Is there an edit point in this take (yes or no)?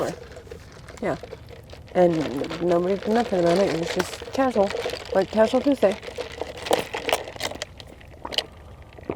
yes